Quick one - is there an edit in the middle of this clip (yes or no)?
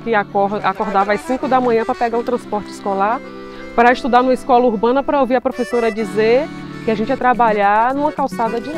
no